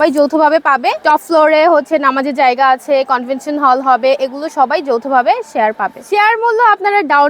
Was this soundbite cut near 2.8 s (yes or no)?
no